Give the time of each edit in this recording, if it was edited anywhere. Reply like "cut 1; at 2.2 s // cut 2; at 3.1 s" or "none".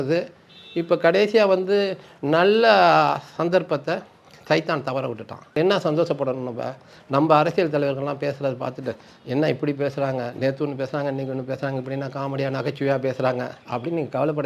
cut 1; at 5.6 s

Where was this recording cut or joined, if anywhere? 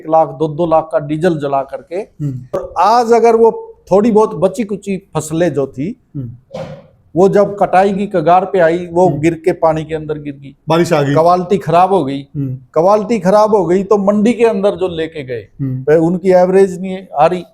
cut 1; at 2.7 s

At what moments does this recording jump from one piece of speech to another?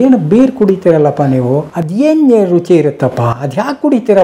cut 1; at 1.8 s

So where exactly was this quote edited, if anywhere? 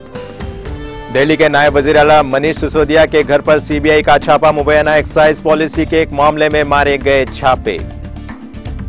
cut 1; at 1.1 s

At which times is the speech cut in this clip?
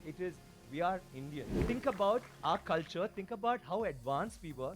cut 1; at 1.6 s

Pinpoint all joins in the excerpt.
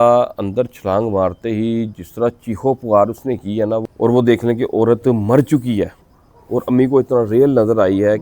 cut 1; at 3.9 s

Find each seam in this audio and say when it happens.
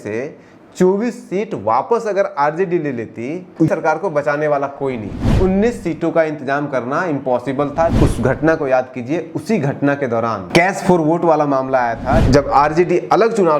cut 1; at 3.7 s // cut 2; at 5.2 s // cut 3; at 7.9 s // cut 4; at 10.4 s // cut 5; at 12.2 s

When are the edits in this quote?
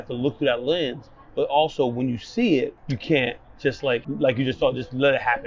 cut 1; at 2.9 s // cut 2; at 4.1 s

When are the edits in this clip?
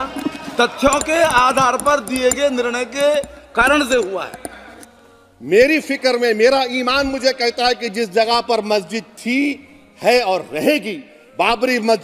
cut 1; at 4.7 s

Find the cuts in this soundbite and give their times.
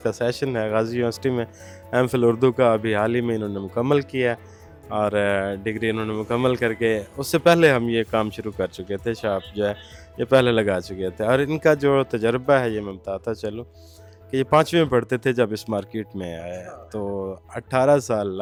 none

